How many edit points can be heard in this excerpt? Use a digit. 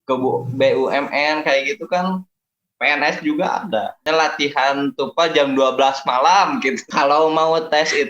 2